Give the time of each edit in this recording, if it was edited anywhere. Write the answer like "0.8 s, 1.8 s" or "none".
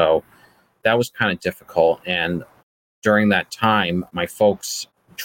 4.1 s